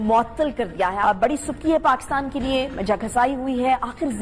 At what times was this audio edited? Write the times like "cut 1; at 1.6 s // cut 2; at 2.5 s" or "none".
cut 1; at 1.0 s